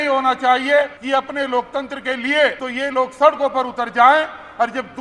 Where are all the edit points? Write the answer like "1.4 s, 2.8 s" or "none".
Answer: 1.0 s, 2.6 s